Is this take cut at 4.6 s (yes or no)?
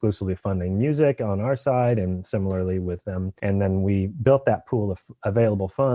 no